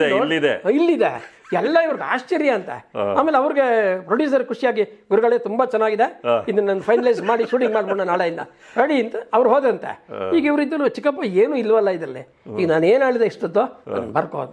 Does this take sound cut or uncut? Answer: uncut